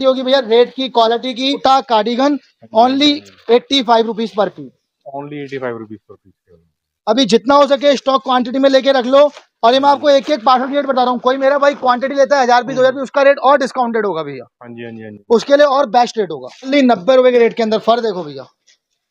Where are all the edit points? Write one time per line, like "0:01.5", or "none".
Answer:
0:01.6
0:16.7